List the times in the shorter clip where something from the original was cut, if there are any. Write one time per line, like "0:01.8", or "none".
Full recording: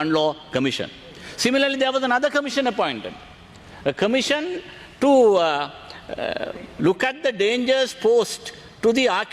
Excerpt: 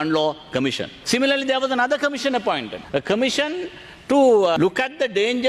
0:00.9
0:02.7
0:04.6